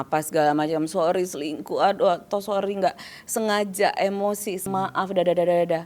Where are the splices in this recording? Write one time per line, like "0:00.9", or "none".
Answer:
0:04.7